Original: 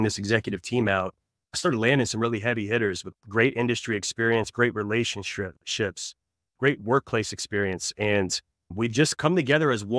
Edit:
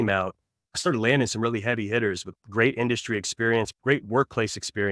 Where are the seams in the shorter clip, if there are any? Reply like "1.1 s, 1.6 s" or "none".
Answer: 3.7 s